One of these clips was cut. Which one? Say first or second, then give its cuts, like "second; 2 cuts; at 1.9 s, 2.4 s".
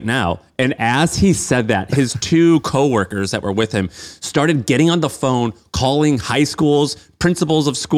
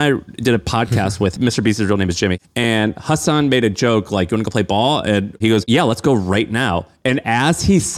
second; 3 cuts; at 1.3 s, 2.4 s, 5.4 s